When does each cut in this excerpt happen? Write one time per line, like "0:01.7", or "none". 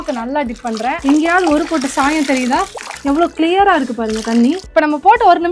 0:01.0
0:02.8
0:04.7